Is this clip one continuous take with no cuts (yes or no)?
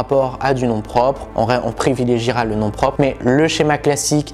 yes